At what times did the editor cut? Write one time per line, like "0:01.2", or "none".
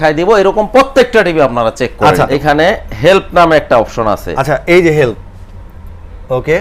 0:02.3